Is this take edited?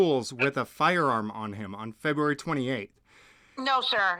no; 0 cuts

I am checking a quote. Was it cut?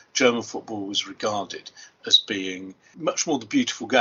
yes; 1 cut; at 2.8 s

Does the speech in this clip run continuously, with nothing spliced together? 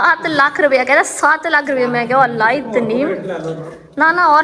yes; 0 cuts

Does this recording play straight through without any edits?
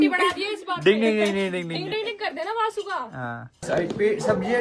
no; 1 cut; at 3.6 s

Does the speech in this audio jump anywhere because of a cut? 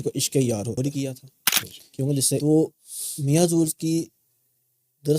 yes; 1 cut; at 2.4 s

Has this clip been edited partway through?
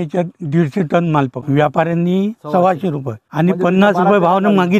yes; 2 cuts; at 1.4 s, 3.3 s

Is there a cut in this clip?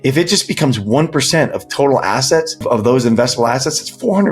yes; 1 cut; at 2.6 s

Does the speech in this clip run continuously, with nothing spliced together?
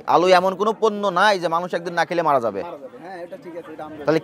yes; 0 cuts

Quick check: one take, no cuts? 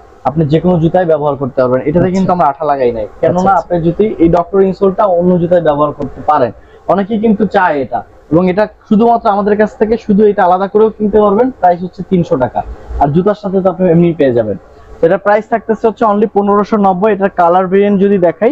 yes; 0 cuts

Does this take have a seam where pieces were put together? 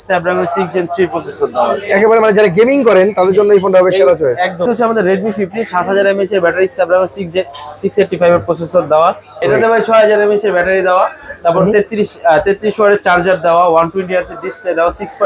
yes; 2 cuts; at 4.6 s, 9.4 s

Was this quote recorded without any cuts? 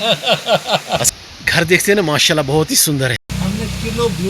no; 2 cuts; at 1.1 s, 3.3 s

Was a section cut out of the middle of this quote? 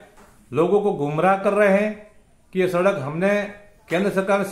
no; 0 cuts

